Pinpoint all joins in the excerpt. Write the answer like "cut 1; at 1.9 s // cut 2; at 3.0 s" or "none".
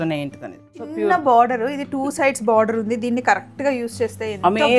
cut 1; at 0.9 s